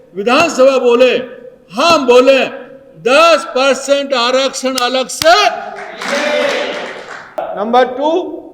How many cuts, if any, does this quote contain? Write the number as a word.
one